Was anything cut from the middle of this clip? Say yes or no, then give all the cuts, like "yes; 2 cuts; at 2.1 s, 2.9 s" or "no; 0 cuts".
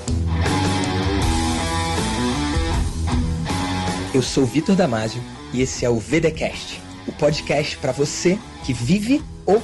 no; 0 cuts